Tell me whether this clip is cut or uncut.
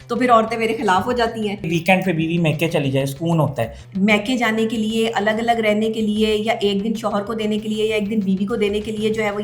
cut